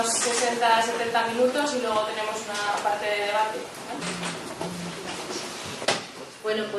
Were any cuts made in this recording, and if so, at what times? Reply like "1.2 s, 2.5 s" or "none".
3.6 s

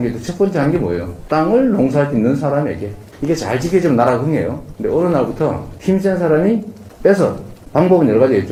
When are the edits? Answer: none

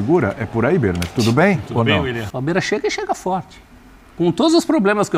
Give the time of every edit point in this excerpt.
2.3 s

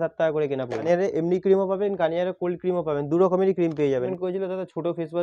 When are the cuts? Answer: 0.8 s, 4.1 s

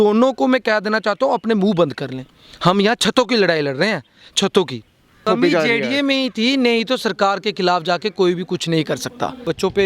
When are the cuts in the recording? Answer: 5.2 s

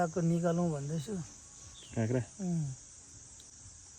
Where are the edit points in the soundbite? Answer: none

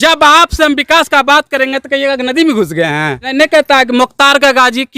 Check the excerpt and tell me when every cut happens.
3.3 s

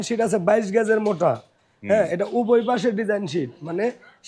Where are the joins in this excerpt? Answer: none

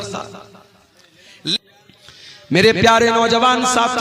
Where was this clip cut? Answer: 1.6 s

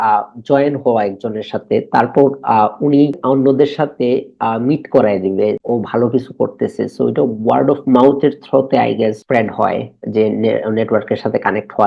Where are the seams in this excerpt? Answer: 3.2 s, 5.6 s, 9.2 s

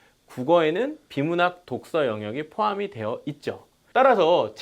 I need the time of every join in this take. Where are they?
3.7 s

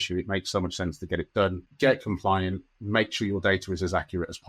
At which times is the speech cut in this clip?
1.7 s

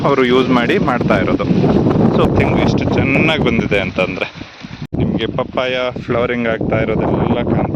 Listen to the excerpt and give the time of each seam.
2.2 s, 4.9 s

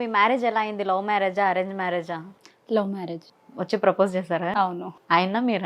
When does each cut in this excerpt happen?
3.3 s

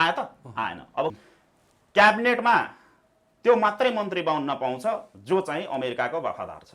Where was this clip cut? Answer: 1.1 s

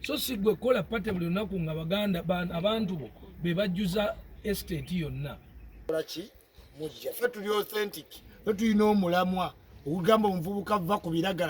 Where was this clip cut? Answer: 5.7 s

